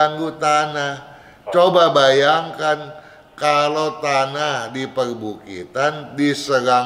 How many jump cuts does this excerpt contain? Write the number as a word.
zero